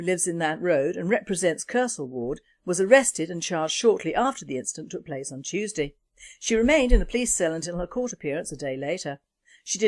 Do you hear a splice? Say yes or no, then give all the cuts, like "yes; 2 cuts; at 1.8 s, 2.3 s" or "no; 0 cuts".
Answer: no; 0 cuts